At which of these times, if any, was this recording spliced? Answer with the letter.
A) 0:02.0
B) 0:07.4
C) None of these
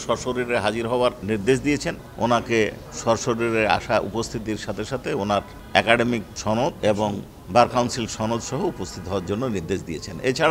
A